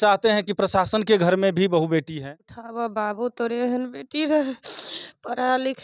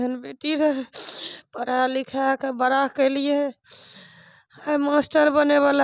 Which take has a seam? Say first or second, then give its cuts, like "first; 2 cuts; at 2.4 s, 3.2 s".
first; 1 cut; at 2.6 s